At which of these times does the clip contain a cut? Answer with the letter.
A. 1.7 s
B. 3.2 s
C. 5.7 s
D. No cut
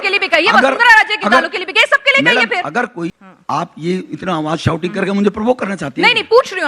B